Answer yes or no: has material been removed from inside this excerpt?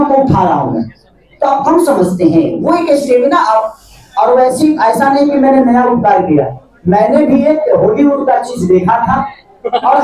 no